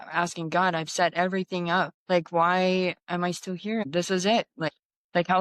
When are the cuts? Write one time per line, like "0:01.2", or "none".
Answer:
0:02.0
0:03.8